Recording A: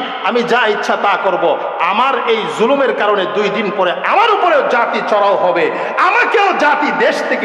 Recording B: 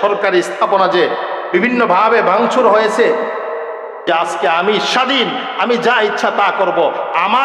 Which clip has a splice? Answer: B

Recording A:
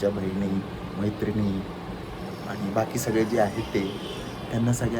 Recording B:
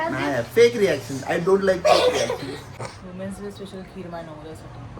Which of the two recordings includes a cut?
B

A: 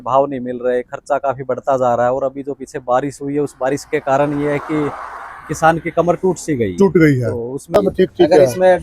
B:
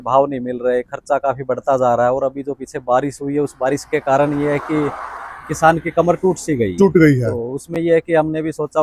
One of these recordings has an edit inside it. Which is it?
A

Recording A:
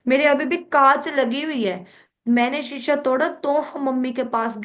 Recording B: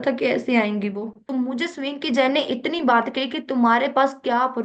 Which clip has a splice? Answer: B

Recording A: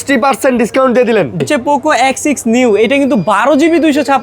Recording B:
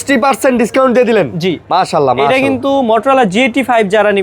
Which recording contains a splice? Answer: A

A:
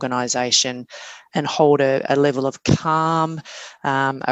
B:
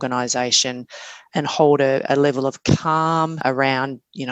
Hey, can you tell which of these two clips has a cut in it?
B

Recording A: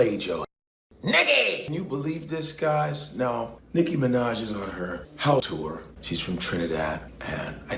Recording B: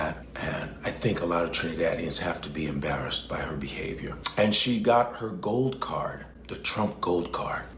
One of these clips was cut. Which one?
A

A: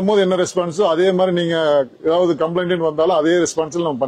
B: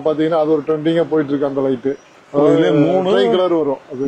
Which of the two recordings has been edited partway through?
B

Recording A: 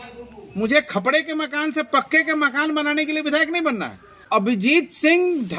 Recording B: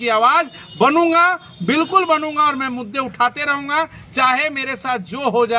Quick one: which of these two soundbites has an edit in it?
A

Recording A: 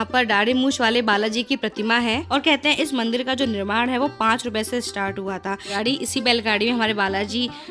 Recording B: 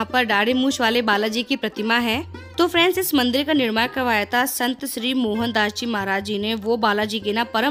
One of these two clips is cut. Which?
A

